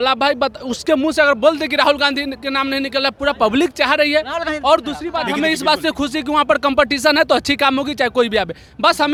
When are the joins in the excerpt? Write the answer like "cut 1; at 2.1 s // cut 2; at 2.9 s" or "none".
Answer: none